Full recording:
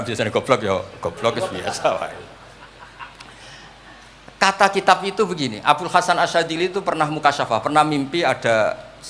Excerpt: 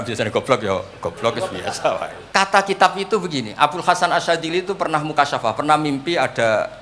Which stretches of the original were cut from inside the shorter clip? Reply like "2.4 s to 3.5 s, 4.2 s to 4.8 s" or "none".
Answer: 2.2 s to 4.3 s